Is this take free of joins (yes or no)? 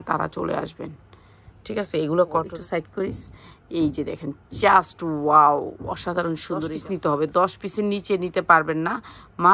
no